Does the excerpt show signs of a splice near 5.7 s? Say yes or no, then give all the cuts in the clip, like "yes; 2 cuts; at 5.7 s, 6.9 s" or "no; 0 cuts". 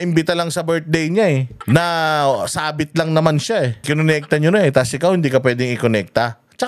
no; 2 cuts; at 1.5 s, 3.8 s